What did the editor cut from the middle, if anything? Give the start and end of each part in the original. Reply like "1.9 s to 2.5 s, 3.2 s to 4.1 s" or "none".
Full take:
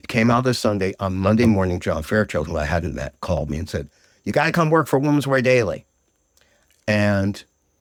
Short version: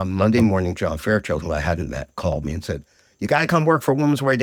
none